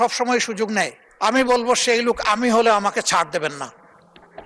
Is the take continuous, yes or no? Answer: no